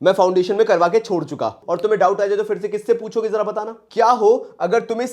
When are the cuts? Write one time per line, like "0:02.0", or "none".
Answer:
0:01.6
0:03.8